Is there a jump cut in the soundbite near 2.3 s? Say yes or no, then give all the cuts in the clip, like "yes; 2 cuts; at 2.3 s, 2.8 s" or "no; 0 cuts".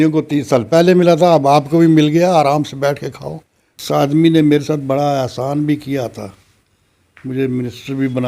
no; 1 cut; at 3.8 s